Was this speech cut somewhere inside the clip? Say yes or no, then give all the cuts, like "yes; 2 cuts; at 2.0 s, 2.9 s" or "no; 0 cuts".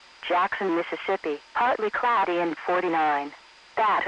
no; 0 cuts